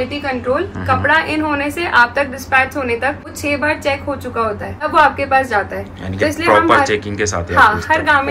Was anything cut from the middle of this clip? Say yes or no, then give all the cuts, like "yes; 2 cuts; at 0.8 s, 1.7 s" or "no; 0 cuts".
yes; 2 cuts; at 3.3 s, 4.9 s